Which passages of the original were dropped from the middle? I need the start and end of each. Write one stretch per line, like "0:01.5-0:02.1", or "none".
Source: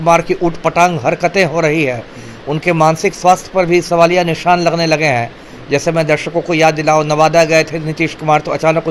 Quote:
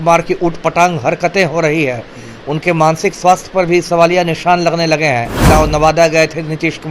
0:05.4-0:06.8